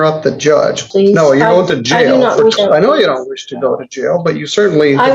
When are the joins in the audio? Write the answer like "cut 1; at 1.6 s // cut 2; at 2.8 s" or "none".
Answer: cut 1; at 0.8 s // cut 2; at 2.6 s